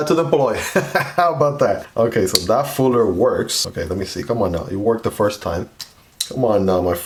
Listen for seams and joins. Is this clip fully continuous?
yes; 0 cuts

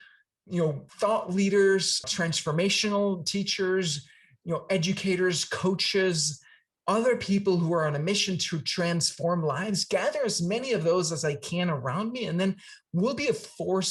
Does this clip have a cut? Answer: yes; 2 cuts; at 0.8 s, 2.0 s

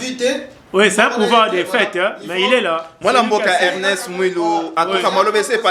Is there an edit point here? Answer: no; 0 cuts

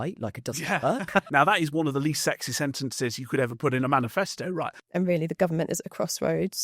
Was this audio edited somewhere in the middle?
yes; 2 cuts; at 1.3 s, 4.8 s

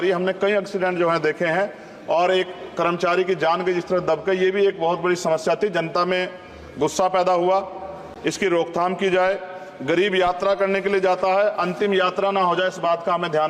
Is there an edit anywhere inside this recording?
no; 0 cuts

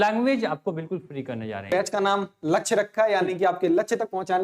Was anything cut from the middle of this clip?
yes; 1 cut; at 1.7 s

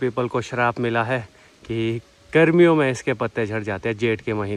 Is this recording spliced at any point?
no; 0 cuts

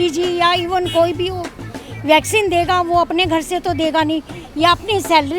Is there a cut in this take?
no; 0 cuts

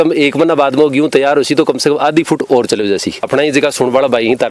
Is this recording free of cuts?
no; 1 cut; at 3.3 s

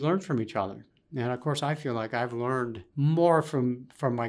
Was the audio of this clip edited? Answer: yes; 1 cut; at 2.8 s

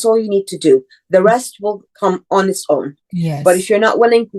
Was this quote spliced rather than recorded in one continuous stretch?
yes; 2 cuts; at 2.0 s, 3.0 s

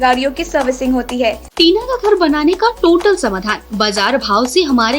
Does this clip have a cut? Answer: yes; 1 cut; at 1.5 s

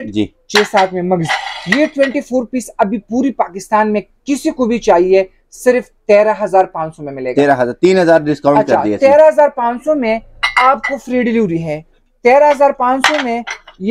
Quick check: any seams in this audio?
no; 0 cuts

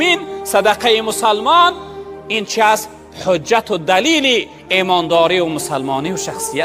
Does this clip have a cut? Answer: no; 0 cuts

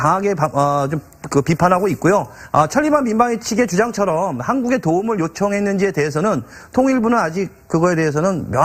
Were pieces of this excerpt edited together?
no; 0 cuts

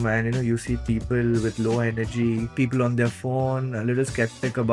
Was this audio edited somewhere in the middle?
no; 0 cuts

